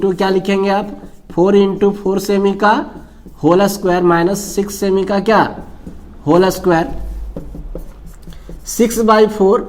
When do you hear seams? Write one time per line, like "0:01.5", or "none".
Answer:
none